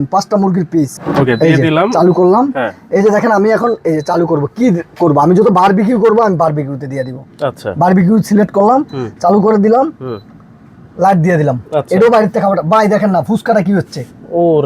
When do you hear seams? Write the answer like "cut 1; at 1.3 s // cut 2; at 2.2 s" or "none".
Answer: cut 1; at 1.0 s

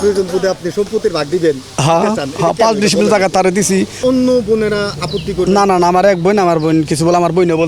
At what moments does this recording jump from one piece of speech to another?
cut 1; at 3.9 s

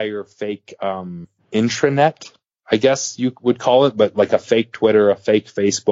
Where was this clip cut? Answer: cut 1; at 1.3 s

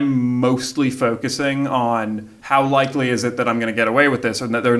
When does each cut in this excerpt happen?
cut 1; at 2.3 s

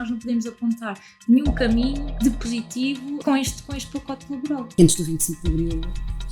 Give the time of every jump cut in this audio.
cut 1; at 2.1 s // cut 2; at 3.2 s // cut 3; at 4.7 s

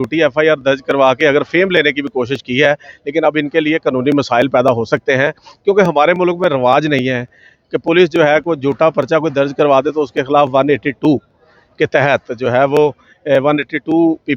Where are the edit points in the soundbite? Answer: none

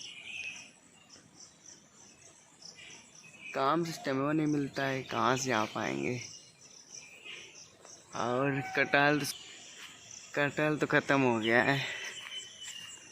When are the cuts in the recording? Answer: none

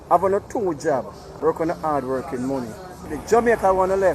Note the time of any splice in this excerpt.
cut 1; at 1.2 s // cut 2; at 3.0 s

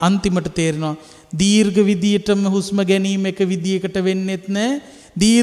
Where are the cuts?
none

